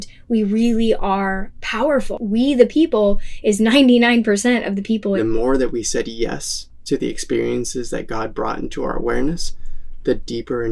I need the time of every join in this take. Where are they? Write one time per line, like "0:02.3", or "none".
0:02.1
0:05.2